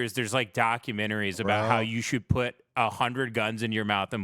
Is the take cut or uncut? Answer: uncut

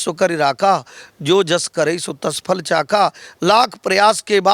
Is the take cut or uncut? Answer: uncut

